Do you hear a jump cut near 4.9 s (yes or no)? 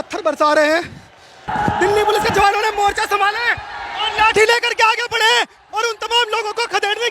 no